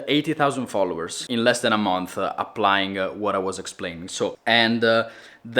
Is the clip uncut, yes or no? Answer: no